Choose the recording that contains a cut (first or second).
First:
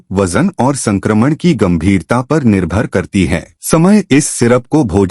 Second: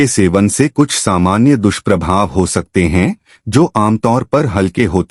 first